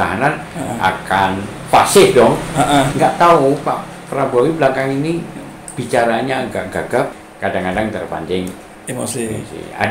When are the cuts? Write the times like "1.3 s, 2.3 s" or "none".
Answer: 2.9 s, 7.1 s